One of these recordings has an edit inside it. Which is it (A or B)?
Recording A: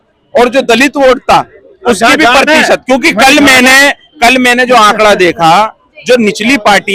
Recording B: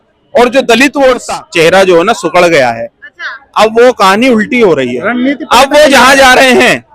B